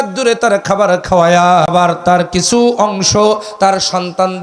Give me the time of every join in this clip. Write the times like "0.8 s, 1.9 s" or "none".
1.7 s